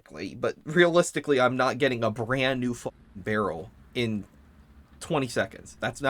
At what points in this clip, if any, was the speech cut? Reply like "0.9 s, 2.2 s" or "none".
none